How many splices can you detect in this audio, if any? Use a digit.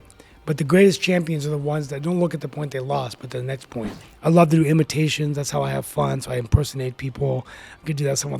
1